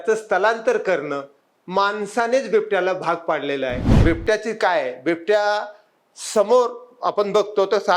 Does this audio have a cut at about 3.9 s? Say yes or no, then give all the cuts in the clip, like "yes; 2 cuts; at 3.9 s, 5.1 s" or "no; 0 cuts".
yes; 1 cut; at 3.9 s